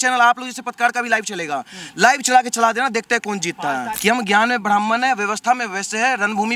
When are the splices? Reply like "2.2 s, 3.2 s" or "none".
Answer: 3.9 s